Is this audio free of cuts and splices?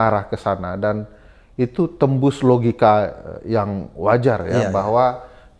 yes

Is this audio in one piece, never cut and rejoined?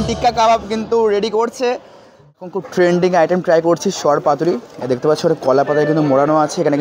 no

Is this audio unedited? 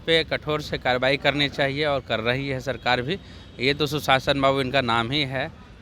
yes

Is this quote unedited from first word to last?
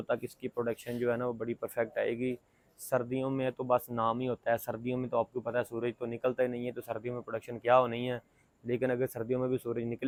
yes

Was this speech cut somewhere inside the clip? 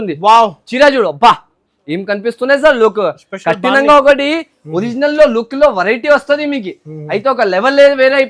no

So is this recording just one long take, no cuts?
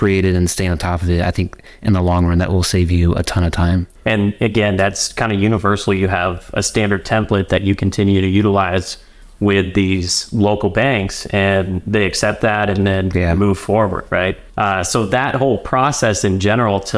no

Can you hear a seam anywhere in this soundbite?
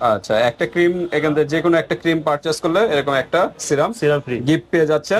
no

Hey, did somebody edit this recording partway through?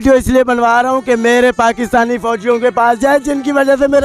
no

